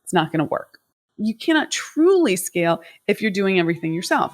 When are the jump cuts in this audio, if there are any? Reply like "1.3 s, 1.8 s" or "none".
0.9 s